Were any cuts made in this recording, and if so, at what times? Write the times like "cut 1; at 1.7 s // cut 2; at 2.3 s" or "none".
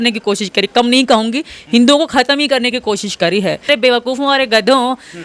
cut 1; at 3.7 s